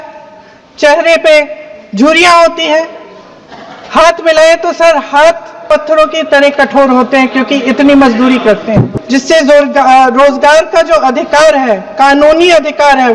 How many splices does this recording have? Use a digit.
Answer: 1